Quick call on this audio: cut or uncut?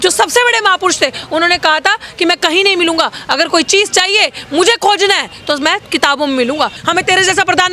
cut